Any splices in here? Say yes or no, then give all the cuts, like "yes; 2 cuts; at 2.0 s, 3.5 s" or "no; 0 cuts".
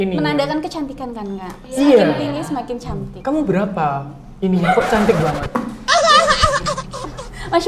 no; 0 cuts